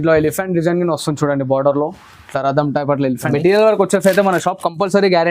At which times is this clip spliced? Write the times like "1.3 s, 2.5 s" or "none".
3.2 s

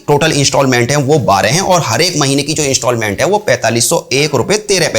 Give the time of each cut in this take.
none

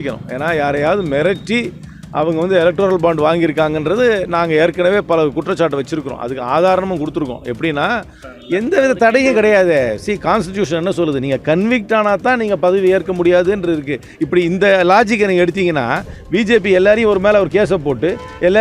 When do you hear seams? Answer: 8.2 s

